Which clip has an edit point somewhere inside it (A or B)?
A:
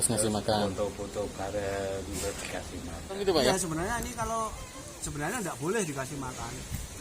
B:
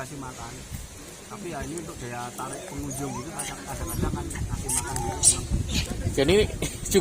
A